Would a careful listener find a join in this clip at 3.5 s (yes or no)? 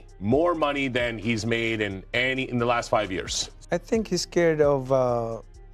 yes